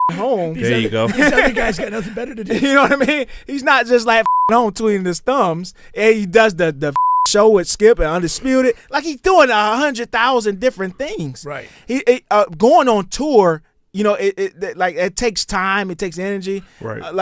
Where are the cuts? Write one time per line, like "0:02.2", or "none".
none